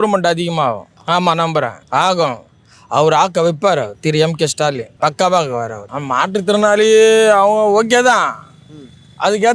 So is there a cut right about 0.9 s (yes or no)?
no